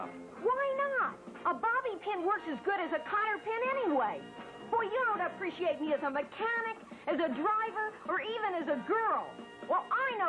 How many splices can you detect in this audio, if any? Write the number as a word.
one